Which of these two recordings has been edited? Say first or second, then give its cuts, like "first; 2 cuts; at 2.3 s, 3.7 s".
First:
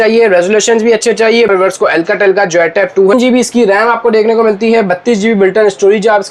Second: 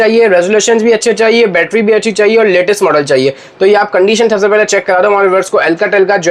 first; 2 cuts; at 1.5 s, 3.1 s